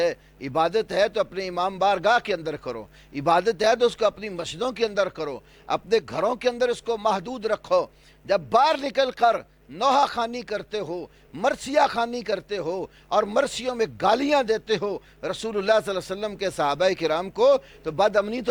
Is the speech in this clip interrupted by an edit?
no; 0 cuts

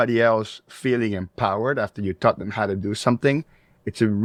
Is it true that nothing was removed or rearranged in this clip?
yes; 0 cuts

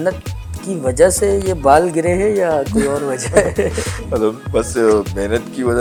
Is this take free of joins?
yes; 0 cuts

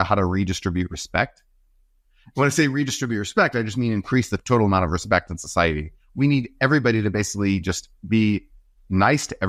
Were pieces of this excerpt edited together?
no; 0 cuts

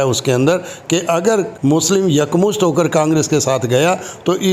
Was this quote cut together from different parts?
yes; 1 cut; at 1.5 s

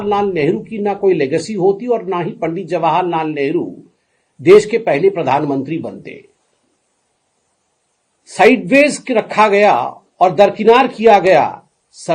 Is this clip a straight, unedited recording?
yes; 0 cuts

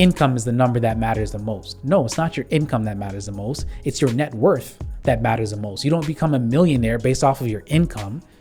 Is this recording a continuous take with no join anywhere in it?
yes; 0 cuts

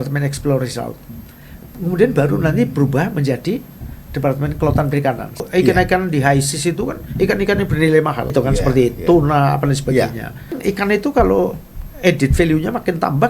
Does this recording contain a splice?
yes; 3 cuts; at 5.3 s, 8.2 s, 10.5 s

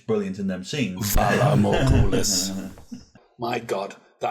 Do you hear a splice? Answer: yes; 1 cut; at 3.2 s

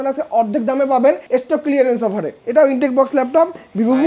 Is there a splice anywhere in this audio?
yes; 2 cuts; at 1.2 s, 2.3 s

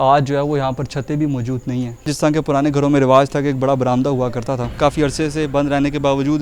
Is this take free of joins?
no; 2 cuts; at 2.1 s, 4.7 s

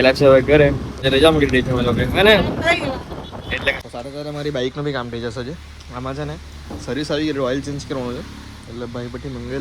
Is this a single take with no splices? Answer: no; 2 cuts; at 1.1 s, 3.8 s

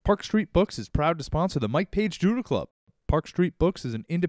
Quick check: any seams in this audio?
no; 0 cuts

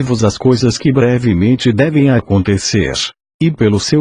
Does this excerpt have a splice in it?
no; 0 cuts

